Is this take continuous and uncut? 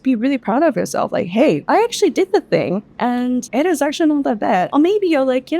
no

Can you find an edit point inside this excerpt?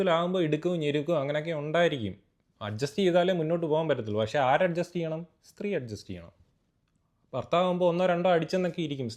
no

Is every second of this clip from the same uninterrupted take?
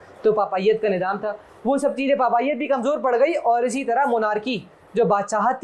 yes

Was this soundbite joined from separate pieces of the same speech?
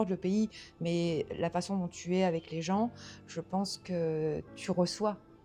no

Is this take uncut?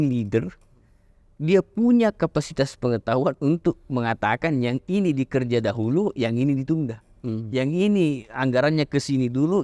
yes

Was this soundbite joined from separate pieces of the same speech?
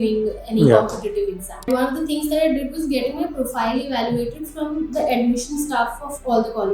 yes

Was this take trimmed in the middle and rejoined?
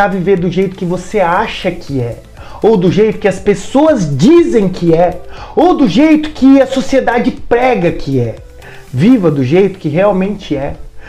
no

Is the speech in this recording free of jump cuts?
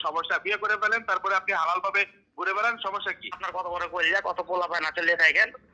no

